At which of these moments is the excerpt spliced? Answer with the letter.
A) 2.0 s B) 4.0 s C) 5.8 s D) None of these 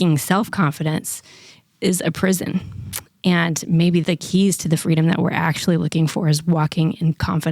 B